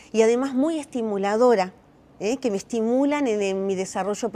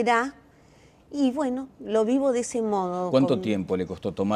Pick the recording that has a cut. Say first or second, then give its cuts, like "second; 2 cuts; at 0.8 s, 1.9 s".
second; 1 cut; at 1.9 s